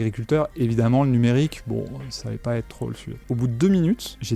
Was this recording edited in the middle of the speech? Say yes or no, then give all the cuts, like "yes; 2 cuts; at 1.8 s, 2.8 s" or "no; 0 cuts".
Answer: yes; 1 cut; at 3.1 s